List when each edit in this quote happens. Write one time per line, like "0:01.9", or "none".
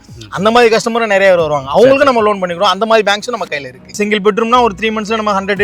0:03.9